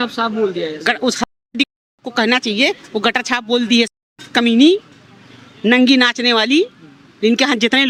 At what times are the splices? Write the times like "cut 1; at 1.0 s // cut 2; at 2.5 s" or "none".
none